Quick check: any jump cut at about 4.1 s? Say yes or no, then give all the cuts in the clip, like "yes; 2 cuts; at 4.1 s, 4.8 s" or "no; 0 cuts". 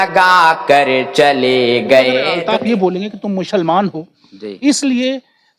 no; 1 cut; at 2.3 s